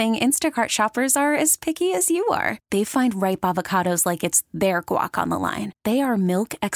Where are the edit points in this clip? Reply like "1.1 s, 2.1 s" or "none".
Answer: none